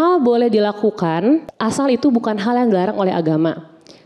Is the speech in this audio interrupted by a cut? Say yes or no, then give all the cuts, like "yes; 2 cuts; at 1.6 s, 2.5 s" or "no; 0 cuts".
yes; 1 cut; at 1.5 s